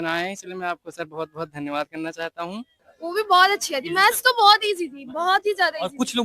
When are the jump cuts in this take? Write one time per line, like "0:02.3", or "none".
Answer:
0:02.8

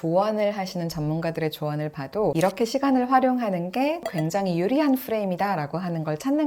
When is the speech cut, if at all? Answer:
0:04.1

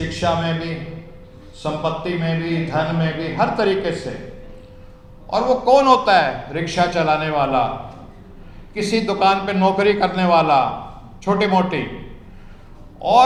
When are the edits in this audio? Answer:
none

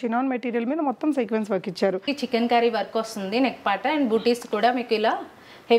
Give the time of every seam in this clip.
0:02.1

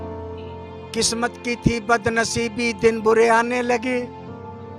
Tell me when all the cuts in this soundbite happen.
0:00.9

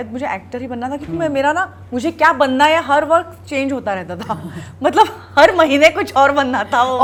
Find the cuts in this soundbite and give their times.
none

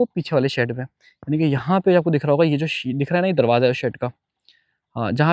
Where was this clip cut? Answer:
none

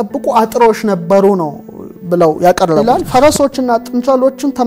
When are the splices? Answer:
0:02.8

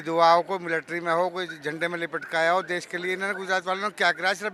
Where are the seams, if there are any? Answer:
none

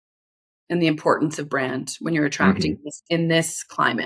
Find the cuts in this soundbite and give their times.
none

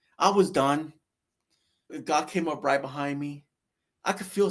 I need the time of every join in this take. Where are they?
0:02.0

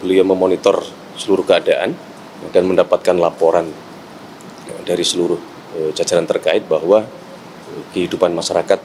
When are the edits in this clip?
none

